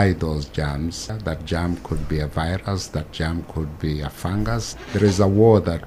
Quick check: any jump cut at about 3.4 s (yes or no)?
no